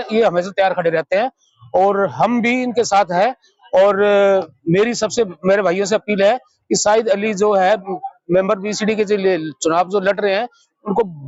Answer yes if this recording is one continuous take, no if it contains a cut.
yes